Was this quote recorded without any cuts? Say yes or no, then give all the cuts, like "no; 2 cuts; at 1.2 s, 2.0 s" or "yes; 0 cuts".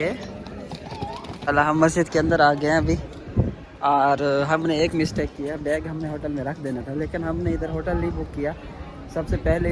no; 1 cut; at 1.4 s